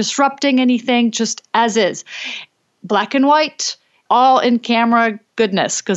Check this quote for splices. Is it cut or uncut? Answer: uncut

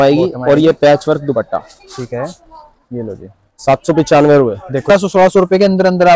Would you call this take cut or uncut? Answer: cut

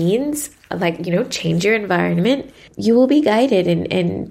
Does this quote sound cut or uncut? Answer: cut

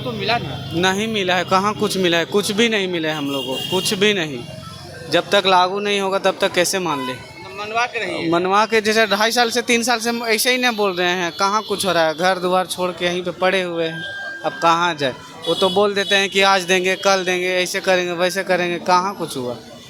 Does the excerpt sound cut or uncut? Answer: uncut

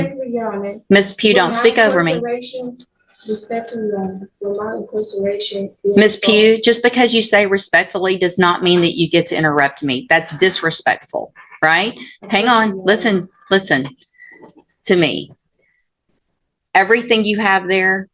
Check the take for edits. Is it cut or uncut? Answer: uncut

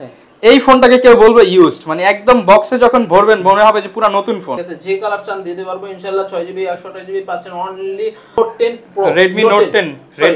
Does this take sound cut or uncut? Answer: cut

